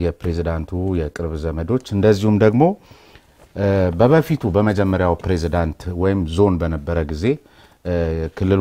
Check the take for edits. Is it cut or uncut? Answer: uncut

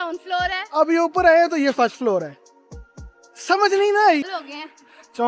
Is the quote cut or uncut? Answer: cut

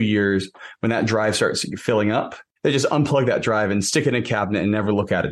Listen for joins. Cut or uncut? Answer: cut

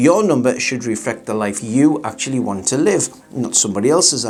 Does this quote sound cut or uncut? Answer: uncut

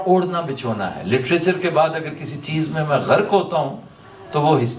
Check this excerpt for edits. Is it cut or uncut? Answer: uncut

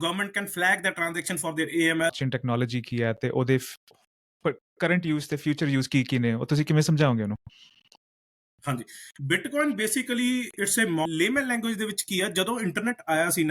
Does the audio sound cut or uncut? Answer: cut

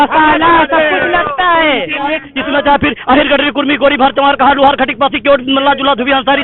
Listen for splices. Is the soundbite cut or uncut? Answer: cut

